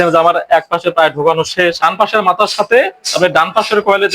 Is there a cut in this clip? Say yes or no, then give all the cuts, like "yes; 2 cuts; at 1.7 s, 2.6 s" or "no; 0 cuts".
yes; 1 cut; at 1.8 s